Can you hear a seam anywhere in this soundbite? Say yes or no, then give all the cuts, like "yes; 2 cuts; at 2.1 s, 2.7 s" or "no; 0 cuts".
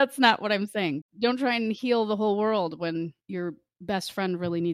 yes; 2 cuts; at 1.1 s, 3.2 s